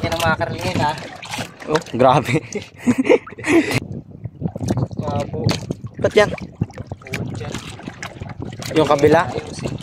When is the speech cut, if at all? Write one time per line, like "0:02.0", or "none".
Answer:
0:03.8